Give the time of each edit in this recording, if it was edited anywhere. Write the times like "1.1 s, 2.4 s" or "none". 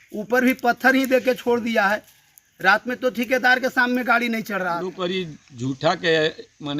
4.8 s